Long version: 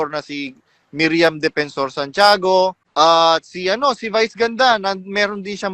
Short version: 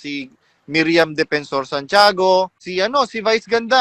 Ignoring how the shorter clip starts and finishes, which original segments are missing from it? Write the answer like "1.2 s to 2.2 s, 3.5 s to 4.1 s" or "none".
2.8 s to 3.5 s